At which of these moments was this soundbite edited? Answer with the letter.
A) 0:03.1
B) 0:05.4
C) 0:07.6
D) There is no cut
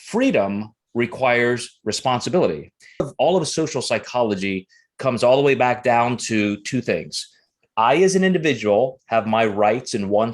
A